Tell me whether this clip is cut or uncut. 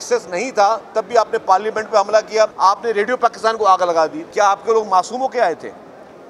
cut